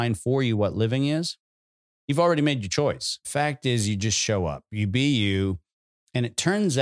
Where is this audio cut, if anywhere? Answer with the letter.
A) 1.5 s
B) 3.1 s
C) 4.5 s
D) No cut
B